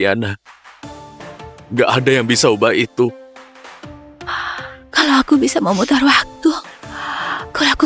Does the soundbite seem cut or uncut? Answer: uncut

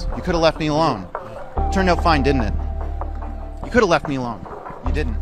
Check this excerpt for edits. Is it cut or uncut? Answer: uncut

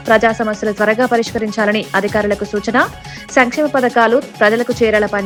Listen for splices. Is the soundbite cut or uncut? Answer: uncut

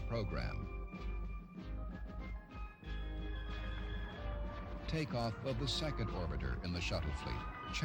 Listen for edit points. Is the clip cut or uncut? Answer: cut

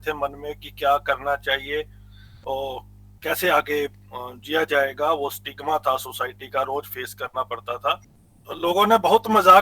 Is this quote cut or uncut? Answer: cut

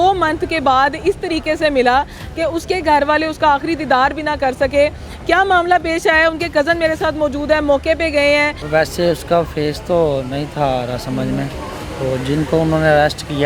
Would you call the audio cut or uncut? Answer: cut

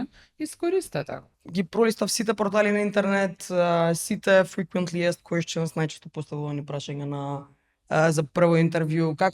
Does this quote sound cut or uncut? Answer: cut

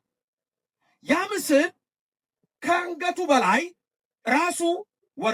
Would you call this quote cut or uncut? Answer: uncut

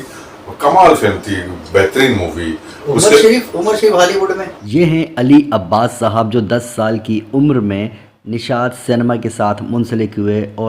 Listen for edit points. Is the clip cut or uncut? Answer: cut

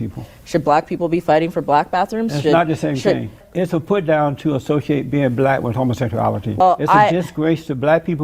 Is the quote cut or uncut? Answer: cut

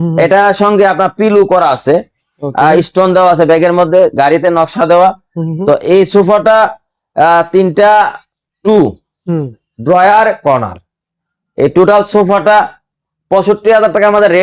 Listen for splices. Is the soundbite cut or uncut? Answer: uncut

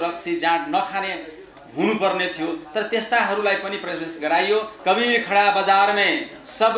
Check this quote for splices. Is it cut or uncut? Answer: cut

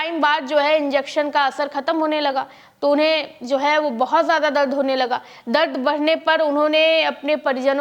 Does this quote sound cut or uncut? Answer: uncut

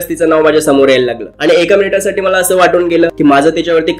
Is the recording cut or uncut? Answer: cut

